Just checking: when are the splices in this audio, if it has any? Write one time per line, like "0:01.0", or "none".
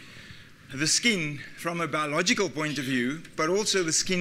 0:01.0

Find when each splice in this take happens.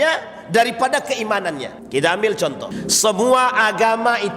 0:01.7
0:02.7

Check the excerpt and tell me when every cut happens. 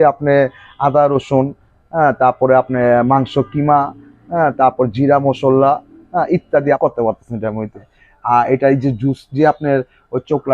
0:06.8
0:08.0

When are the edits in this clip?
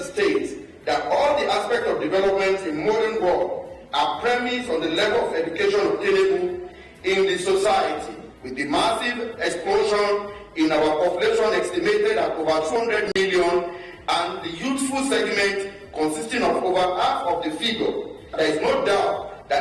0:12.8

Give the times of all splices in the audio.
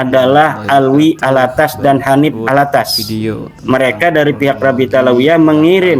0:03.6

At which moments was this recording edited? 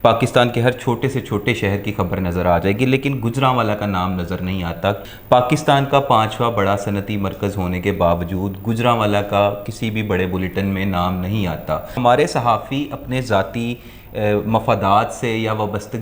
0:05.0
0:12.0

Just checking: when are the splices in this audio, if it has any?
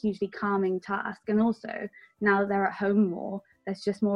none

